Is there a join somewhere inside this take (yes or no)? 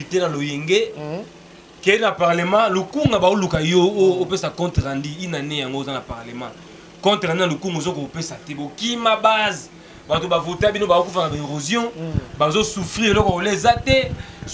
no